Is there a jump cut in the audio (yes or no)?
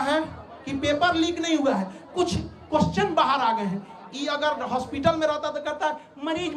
no